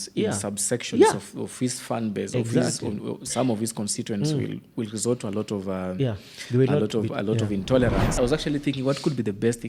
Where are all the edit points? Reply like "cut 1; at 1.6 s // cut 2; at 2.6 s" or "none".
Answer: cut 1; at 8.1 s